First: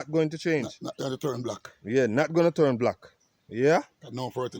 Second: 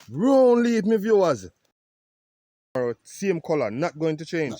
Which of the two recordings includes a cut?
second; 1 cut; at 2.2 s

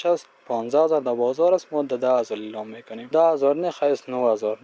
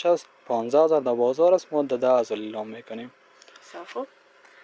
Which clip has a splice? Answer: first; 1 cut; at 3.1 s

